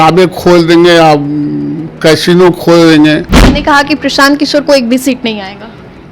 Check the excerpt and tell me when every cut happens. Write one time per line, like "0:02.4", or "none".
0:03.4